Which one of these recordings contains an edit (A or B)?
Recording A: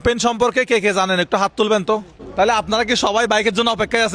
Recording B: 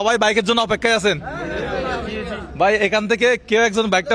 A